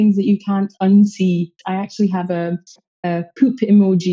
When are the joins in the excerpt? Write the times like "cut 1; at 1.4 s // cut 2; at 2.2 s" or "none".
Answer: cut 1; at 1.6 s